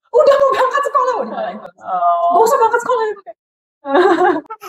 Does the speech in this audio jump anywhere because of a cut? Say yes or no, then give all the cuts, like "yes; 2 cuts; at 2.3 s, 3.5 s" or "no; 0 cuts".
no; 0 cuts